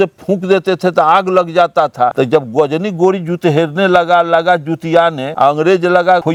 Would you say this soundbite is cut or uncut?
uncut